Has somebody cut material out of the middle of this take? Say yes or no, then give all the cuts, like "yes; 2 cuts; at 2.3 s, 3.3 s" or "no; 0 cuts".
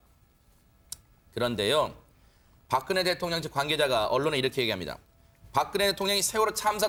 no; 0 cuts